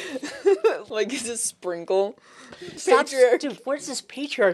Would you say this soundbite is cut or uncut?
cut